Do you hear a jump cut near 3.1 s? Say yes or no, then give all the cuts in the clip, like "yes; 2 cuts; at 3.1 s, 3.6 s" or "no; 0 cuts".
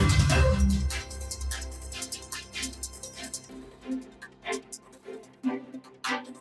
yes; 2 cuts; at 0.9 s, 3.1 s